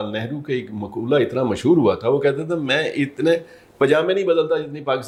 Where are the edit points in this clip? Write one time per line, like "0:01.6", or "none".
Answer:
none